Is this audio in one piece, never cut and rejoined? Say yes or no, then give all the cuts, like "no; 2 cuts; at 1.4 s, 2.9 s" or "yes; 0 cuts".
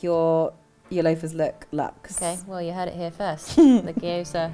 yes; 0 cuts